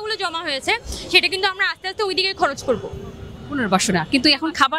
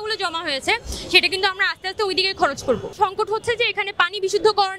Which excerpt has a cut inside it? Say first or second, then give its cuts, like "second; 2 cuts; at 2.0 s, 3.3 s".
second; 1 cut; at 2.9 s